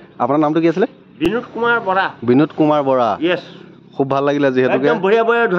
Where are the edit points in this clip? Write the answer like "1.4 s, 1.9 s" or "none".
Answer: 1.3 s